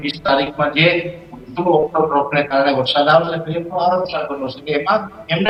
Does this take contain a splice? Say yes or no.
no